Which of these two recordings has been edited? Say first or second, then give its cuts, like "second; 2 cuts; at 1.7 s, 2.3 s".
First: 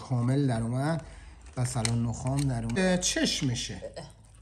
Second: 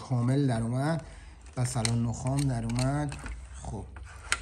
first; 1 cut; at 2.8 s